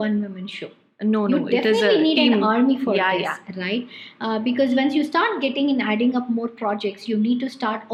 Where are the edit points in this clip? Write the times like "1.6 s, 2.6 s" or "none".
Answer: none

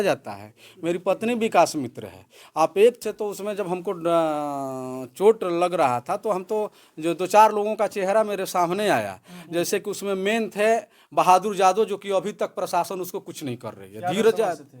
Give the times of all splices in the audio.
3.0 s

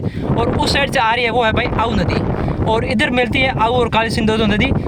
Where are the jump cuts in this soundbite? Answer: none

